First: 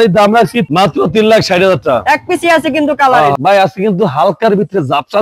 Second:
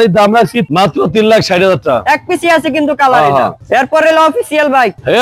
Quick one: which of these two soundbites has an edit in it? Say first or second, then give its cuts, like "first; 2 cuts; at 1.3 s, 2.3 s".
first; 1 cut; at 3.3 s